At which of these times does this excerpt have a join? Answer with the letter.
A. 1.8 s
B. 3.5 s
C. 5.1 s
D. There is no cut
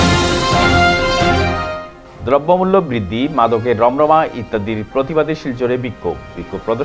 D